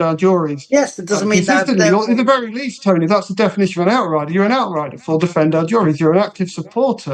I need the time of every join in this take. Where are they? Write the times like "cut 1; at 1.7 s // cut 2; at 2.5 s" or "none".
none